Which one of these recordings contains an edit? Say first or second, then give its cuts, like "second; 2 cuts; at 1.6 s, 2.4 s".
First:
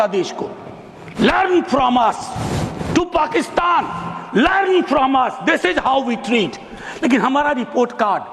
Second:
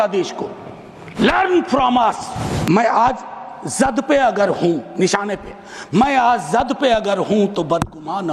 second; 1 cut; at 2.6 s